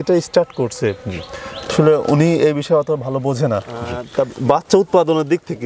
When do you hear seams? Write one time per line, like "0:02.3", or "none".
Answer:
0:03.9